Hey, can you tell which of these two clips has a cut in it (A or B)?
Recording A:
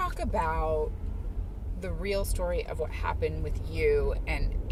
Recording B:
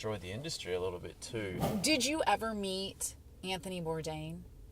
B